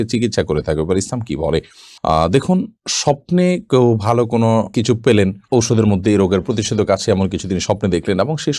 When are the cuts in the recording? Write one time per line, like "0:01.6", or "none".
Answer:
none